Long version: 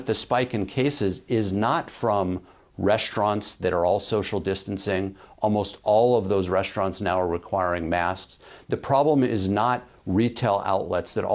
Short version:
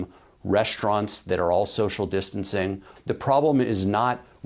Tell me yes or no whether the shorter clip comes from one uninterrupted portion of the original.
no